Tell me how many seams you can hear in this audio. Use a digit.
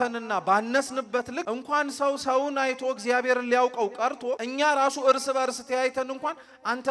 2